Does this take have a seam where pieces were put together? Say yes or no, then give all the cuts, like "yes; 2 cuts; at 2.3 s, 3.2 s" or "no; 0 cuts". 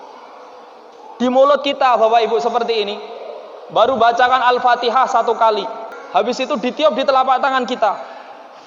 yes; 1 cut; at 5.9 s